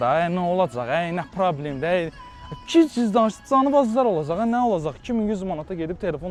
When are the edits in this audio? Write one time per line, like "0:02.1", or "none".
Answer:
none